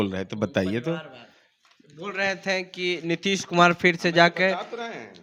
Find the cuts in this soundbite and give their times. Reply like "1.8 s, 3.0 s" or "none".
none